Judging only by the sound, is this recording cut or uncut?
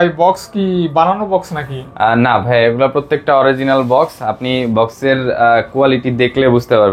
uncut